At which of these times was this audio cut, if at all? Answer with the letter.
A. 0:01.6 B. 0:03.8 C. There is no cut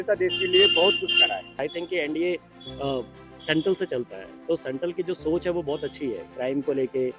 A